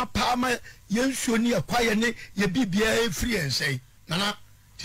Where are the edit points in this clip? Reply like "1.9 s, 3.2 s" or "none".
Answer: 3.9 s